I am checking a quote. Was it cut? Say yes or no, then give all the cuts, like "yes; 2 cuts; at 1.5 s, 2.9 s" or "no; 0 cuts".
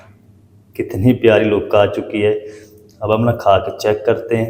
no; 0 cuts